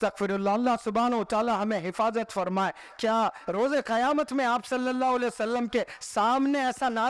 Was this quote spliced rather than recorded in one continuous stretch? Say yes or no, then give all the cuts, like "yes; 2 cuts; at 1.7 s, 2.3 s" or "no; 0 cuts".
no; 0 cuts